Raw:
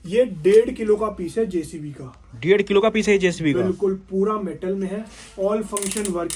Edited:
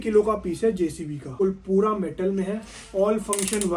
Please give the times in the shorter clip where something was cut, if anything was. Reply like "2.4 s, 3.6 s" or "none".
1.3 s